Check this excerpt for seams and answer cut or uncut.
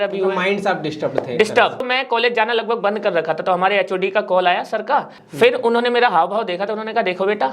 cut